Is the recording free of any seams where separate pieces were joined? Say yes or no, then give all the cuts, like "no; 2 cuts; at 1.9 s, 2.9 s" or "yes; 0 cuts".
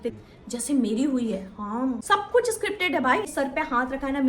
no; 2 cuts; at 2.0 s, 3.3 s